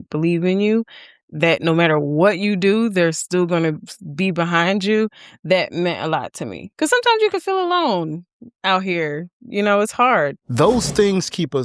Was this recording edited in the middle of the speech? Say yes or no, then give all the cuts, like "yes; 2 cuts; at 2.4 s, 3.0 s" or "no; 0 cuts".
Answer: yes; 2 cuts; at 6.6 s, 10.4 s